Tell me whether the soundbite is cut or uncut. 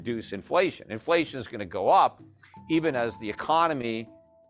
uncut